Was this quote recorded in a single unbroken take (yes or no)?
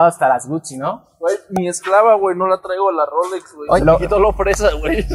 no